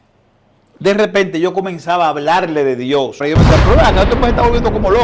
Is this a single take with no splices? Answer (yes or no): no